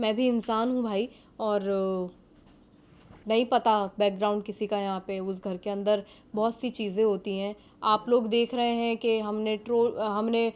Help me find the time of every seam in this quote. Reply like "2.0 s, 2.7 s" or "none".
none